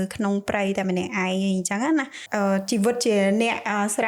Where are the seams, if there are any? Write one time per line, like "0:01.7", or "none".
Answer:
0:02.2